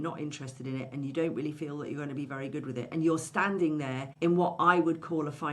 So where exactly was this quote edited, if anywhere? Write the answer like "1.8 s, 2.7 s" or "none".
4.0 s